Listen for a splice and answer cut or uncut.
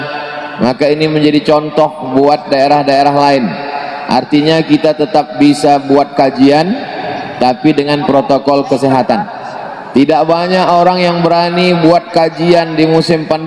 cut